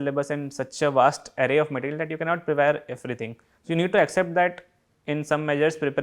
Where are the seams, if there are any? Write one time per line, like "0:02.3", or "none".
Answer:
none